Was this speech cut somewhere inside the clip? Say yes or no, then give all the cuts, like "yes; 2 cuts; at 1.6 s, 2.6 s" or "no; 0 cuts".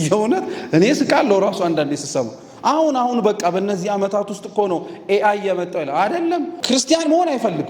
yes; 1 cut; at 6.6 s